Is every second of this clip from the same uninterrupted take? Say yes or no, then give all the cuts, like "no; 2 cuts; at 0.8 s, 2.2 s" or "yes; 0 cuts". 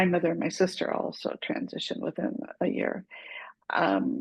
yes; 0 cuts